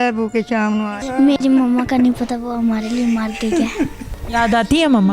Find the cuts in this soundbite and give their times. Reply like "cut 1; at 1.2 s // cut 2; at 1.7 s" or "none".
cut 1; at 1.0 s // cut 2; at 4.0 s

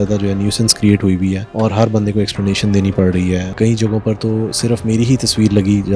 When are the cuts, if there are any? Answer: cut 1; at 1.5 s // cut 2; at 3.5 s

